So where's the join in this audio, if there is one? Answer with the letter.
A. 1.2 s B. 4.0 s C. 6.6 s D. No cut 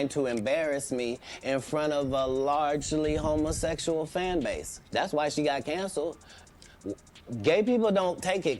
A